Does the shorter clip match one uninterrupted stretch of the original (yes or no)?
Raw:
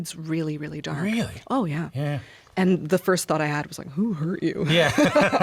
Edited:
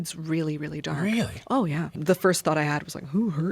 no